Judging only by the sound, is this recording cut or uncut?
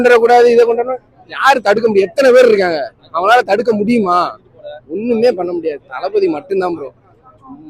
uncut